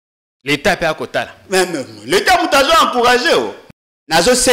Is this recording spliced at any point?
yes; 1 cut; at 3.6 s

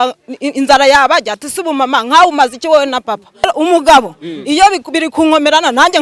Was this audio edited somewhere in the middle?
yes; 1 cut; at 3.5 s

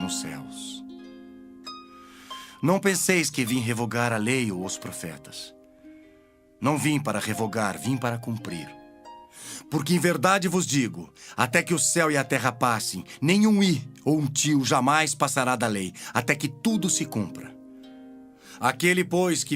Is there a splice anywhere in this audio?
yes; 1 cut; at 14.3 s

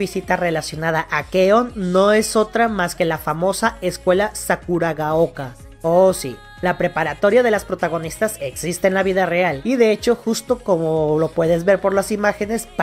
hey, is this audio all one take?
yes; 0 cuts

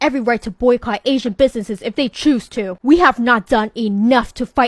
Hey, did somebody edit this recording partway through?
no; 0 cuts

